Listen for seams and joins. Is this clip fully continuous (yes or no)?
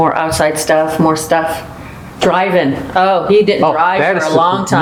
yes